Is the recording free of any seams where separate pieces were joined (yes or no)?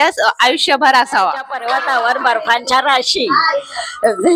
no